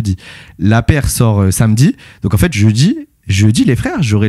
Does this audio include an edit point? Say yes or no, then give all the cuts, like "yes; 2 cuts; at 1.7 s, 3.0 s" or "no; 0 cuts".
no; 0 cuts